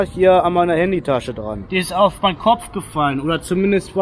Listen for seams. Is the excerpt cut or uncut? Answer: cut